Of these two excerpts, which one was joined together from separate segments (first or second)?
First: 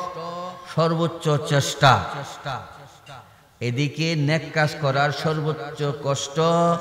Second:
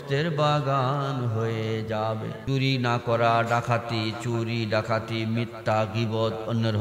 second